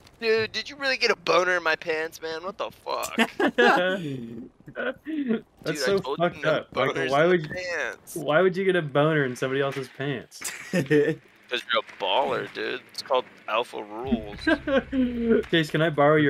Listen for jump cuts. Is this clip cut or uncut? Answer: uncut